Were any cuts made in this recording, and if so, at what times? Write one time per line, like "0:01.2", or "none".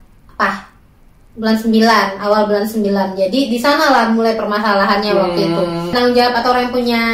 0:05.9